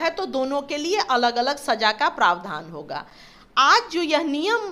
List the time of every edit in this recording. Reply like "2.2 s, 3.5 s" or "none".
none